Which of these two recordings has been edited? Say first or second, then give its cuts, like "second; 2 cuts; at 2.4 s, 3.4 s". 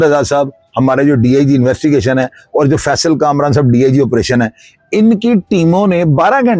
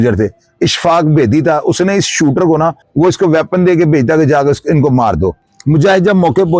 second; 2 cuts; at 2.8 s, 5.5 s